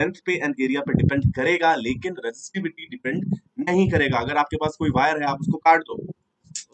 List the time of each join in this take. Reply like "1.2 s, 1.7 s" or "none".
none